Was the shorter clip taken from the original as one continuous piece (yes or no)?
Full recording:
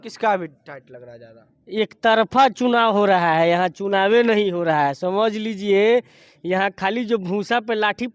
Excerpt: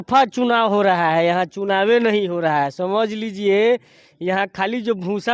yes